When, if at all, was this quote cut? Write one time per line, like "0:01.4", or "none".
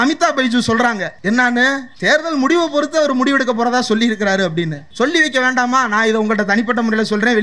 0:01.1
0:01.9
0:04.8